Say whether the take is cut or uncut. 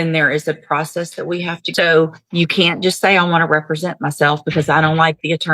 cut